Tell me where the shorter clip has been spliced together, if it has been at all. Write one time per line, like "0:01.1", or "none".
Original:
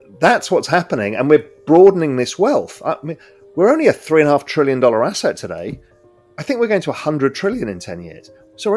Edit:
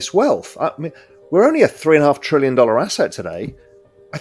none